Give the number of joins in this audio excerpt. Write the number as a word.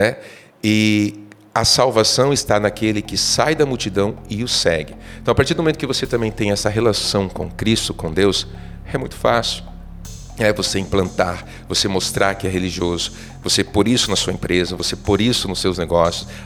zero